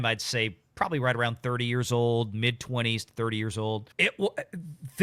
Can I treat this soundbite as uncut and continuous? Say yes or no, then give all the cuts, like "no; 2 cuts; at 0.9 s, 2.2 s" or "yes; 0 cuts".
yes; 0 cuts